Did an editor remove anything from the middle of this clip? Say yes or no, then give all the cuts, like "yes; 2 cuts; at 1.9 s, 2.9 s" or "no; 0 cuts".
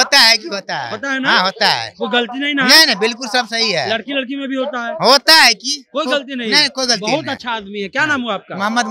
no; 0 cuts